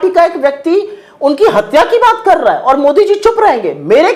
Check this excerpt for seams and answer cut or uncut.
uncut